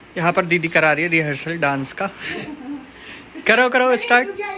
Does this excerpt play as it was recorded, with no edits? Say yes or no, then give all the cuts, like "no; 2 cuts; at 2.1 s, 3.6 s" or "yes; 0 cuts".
yes; 0 cuts